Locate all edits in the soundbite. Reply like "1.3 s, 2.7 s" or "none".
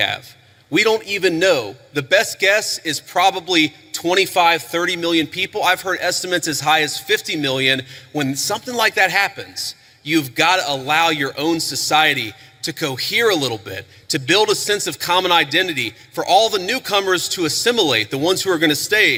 none